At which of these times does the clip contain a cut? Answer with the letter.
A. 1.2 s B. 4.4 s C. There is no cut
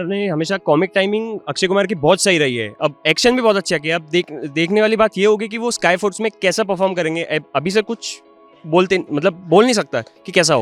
C